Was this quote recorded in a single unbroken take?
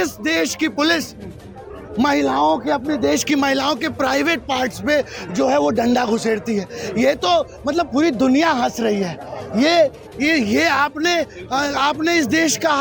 yes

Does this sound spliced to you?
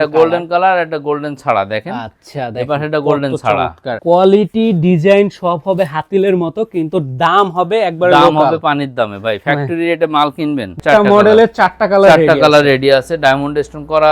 yes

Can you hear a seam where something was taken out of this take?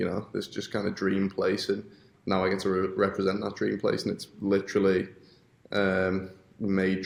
no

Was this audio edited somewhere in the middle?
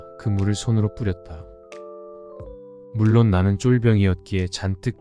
yes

